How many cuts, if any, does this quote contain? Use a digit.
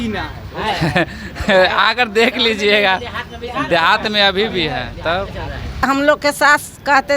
1